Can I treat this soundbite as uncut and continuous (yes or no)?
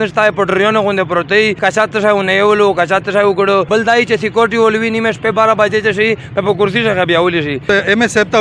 no